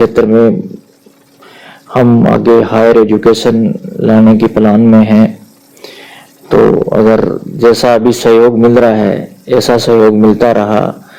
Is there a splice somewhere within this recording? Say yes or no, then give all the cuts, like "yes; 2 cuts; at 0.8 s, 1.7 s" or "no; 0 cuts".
no; 0 cuts